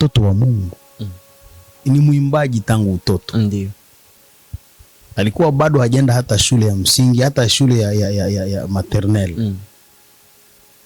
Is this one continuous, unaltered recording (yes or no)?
no